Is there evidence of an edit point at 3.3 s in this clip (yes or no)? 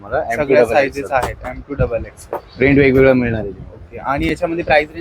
no